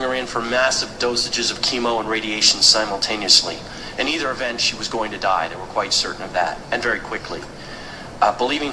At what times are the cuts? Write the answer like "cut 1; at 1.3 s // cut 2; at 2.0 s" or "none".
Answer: cut 1; at 3.8 s